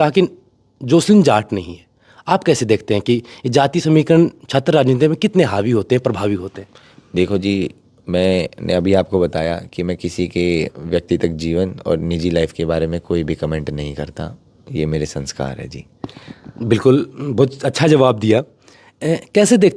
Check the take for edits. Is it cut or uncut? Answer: uncut